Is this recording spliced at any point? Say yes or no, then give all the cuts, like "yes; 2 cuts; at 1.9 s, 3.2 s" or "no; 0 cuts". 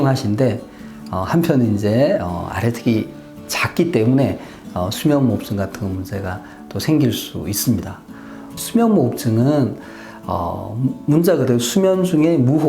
yes; 1 cut; at 8.4 s